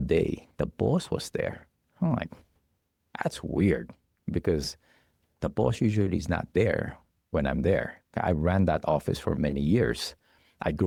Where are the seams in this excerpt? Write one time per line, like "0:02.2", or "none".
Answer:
none